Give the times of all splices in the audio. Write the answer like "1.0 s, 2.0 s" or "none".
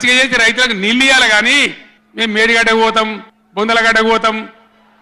none

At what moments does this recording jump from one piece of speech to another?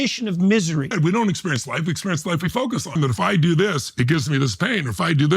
0.9 s, 3.0 s

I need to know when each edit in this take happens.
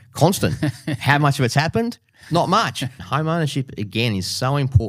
3.0 s

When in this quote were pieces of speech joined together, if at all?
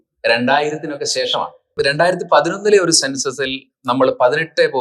1.7 s

